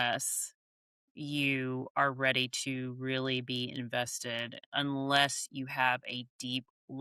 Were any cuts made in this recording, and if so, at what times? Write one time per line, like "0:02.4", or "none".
none